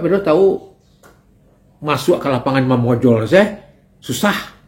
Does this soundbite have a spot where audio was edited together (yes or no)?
no